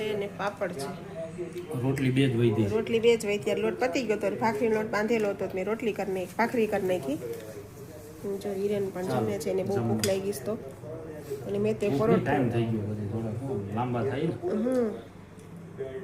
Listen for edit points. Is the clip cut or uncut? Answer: uncut